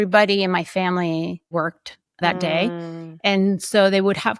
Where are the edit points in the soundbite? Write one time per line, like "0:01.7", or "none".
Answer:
0:01.5